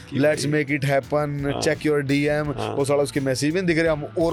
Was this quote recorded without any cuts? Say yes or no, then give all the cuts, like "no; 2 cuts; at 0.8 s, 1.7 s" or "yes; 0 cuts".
yes; 0 cuts